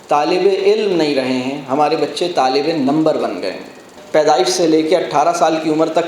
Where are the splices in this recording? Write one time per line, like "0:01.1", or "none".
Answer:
0:03.9